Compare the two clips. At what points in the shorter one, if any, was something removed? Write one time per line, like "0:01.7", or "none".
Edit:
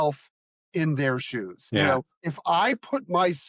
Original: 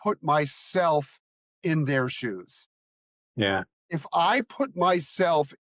0:01.9